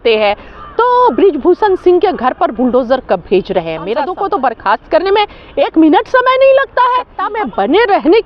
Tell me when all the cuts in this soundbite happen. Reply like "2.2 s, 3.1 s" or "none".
4.0 s, 7.2 s